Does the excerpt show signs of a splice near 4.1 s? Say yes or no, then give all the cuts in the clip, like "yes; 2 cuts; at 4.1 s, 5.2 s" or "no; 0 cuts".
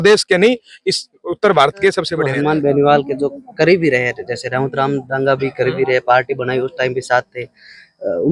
no; 1 cut; at 2.2 s